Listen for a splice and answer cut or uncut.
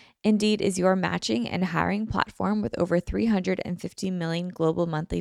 uncut